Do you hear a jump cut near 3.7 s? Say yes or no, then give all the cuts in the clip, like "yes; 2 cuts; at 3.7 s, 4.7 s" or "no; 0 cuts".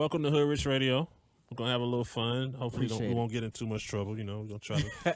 yes; 1 cut; at 3.7 s